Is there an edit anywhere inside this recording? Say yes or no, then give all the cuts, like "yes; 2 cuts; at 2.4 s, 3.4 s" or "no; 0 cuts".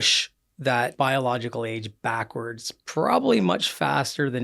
yes; 1 cut; at 0.9 s